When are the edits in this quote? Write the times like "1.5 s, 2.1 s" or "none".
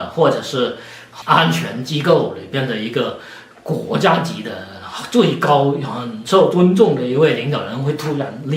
1.0 s